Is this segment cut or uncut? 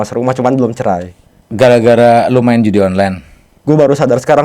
cut